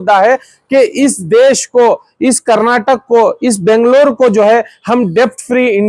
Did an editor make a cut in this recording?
no; 0 cuts

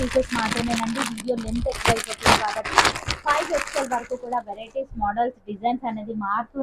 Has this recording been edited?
no; 0 cuts

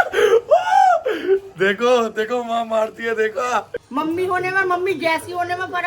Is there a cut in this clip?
yes; 1 cut; at 3.7 s

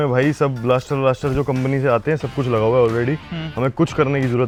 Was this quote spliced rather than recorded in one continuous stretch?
no; 0 cuts

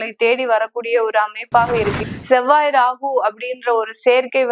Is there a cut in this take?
yes; 1 cut; at 2.0 s

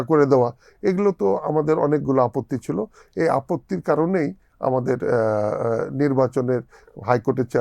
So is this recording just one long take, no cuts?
yes; 0 cuts

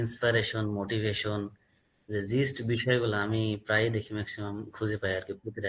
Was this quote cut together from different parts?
no; 0 cuts

